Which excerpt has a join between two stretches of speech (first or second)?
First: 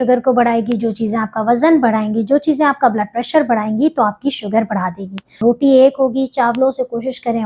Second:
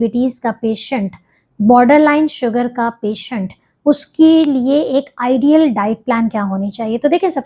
first